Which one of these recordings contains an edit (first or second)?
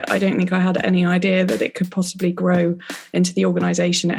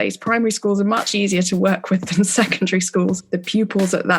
second